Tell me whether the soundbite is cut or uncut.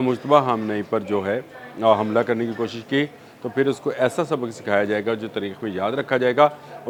uncut